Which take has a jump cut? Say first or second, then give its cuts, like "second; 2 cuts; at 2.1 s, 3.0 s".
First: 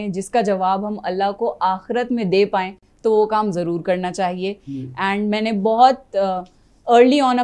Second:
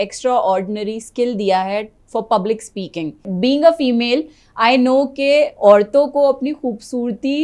second; 1 cut; at 3.3 s